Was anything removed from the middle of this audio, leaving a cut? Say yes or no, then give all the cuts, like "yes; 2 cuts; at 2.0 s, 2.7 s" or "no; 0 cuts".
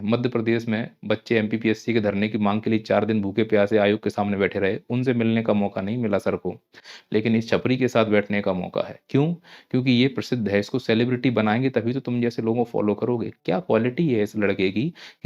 no; 0 cuts